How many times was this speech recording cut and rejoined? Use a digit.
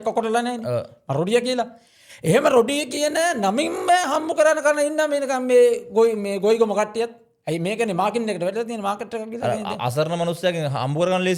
0